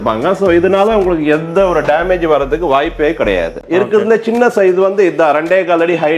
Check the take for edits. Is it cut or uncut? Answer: cut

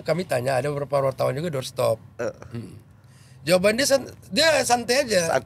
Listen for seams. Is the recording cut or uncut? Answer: uncut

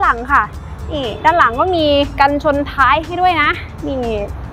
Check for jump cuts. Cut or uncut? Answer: uncut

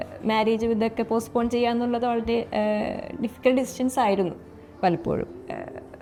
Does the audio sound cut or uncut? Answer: uncut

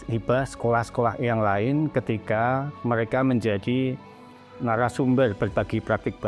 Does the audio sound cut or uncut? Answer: uncut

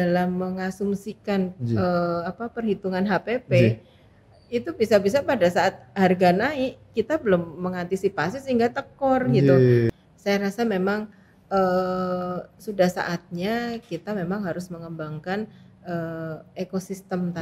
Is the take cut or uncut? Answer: cut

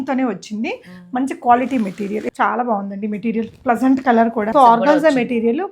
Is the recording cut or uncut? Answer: cut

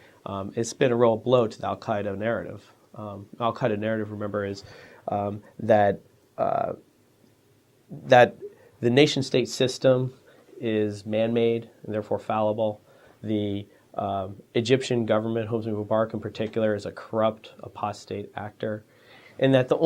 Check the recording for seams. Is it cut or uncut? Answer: uncut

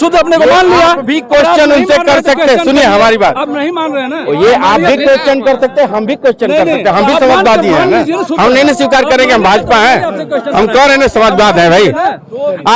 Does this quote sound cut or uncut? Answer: uncut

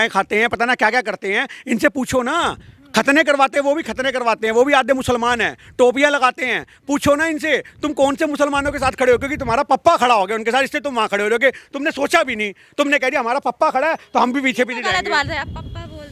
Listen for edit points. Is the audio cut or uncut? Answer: uncut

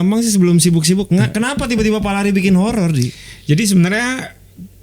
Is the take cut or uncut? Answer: cut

